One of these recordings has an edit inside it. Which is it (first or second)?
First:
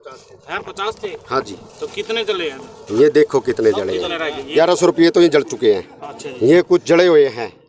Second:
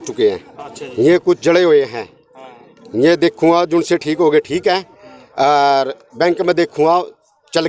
first